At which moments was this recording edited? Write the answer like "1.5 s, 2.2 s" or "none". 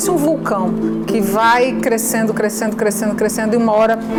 none